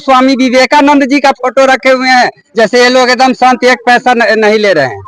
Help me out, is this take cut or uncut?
uncut